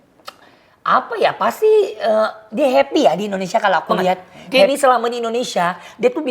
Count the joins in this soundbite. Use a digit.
1